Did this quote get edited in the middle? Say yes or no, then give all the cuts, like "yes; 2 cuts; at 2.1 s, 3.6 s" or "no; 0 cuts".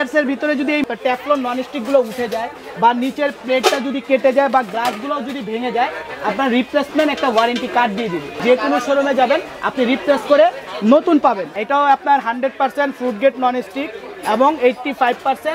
yes; 3 cuts; at 0.8 s, 8.4 s, 11.6 s